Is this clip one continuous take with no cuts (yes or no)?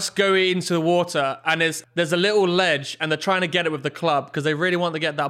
no